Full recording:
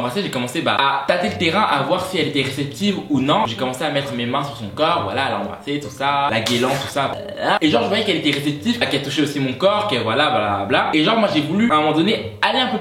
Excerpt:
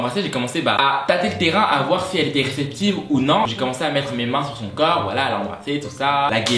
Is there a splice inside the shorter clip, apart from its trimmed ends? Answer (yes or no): no